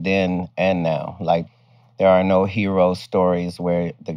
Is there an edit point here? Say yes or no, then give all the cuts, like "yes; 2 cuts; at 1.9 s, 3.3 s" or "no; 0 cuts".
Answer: yes; 1 cut; at 1.5 s